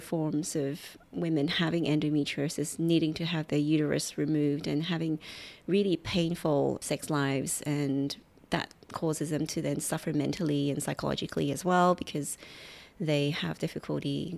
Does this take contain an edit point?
yes; 1 cut; at 6.8 s

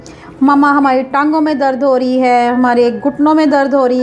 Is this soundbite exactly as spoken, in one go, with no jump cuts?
yes; 0 cuts

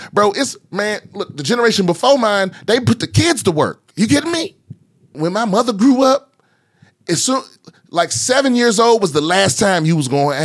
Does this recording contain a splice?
yes; 1 cut; at 5.1 s

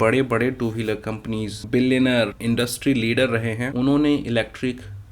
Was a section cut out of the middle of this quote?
yes; 3 cuts; at 1.5 s, 2.4 s, 3.6 s

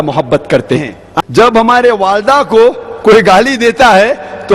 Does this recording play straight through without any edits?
no; 1 cut; at 1.0 s

